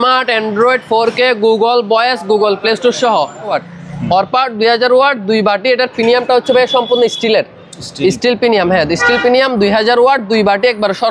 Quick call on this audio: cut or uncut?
cut